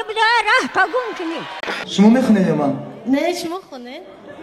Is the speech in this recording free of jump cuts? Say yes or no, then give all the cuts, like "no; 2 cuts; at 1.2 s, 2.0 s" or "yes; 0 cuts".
no; 1 cut; at 1.8 s